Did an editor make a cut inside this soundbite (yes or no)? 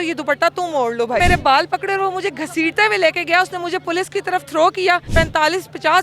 yes